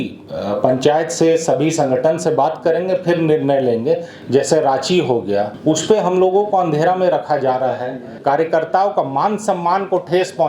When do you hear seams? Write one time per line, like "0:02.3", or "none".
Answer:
0:04.1
0:05.5
0:08.1